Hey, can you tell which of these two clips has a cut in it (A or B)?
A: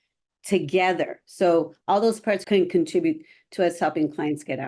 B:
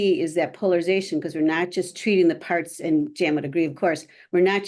A